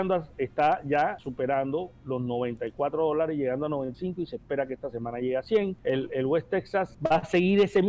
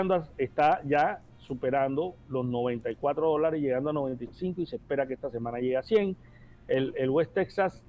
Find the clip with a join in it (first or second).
first